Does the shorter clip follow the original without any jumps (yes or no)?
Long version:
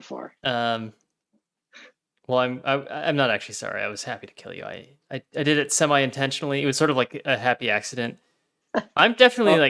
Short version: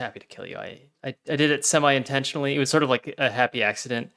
yes